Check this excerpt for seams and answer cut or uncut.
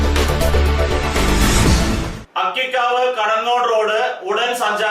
cut